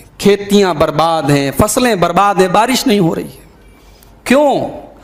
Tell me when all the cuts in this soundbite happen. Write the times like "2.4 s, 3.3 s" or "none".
none